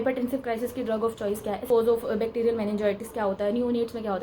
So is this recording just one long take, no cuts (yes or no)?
no